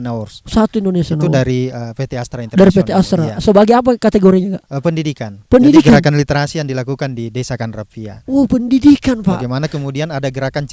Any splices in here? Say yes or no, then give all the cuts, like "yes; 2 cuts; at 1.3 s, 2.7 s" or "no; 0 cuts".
no; 0 cuts